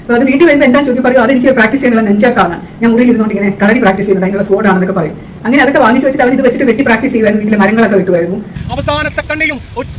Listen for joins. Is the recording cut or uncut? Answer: cut